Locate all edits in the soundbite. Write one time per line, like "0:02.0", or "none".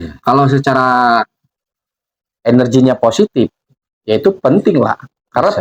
none